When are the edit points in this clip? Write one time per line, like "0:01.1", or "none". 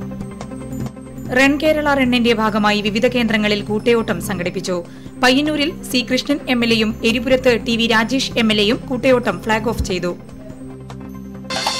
0:00.9